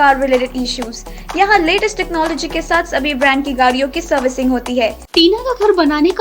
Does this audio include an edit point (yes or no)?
yes